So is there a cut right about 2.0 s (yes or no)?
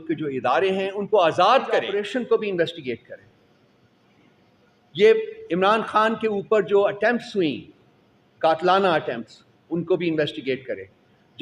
yes